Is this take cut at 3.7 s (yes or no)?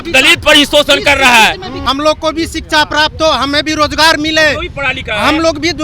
no